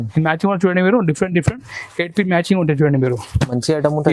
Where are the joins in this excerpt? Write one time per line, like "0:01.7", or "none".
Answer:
none